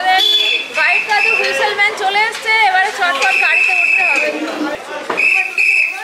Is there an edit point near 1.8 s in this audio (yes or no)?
no